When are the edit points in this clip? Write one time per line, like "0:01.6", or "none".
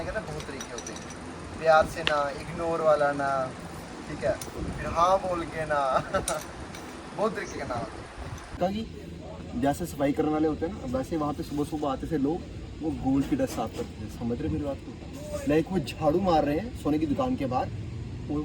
0:08.6